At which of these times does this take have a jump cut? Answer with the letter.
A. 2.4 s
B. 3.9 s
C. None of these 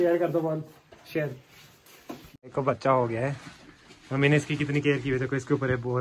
A